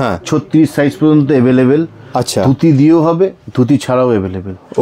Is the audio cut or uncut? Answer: uncut